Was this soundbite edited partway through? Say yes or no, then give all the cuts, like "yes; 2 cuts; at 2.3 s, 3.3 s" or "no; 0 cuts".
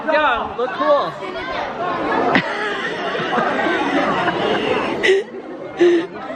no; 0 cuts